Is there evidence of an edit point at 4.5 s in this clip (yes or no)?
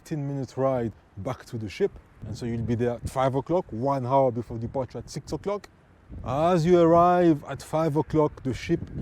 no